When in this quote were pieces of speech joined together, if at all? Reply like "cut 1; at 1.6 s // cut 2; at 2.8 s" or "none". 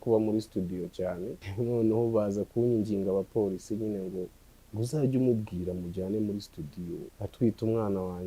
cut 1; at 1.5 s // cut 2; at 7.0 s